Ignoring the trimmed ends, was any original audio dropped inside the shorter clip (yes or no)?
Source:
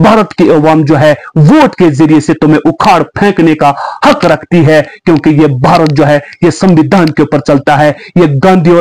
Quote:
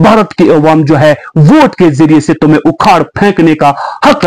no